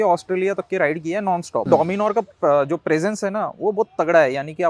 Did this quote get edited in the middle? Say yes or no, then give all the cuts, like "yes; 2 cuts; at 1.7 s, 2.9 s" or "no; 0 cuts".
yes; 1 cut; at 1.7 s